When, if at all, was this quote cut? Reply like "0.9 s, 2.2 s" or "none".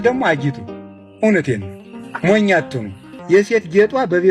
3.1 s